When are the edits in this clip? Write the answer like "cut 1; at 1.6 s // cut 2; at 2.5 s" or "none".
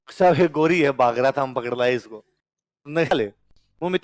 cut 1; at 3.1 s